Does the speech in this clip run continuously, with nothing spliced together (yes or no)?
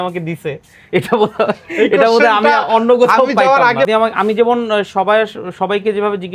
no